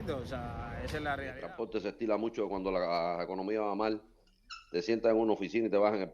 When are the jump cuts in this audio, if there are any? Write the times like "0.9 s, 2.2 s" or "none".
1.2 s